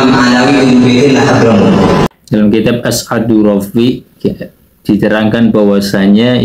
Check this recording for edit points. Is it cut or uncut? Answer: uncut